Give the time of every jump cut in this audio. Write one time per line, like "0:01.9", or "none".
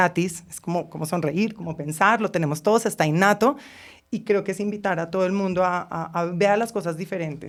none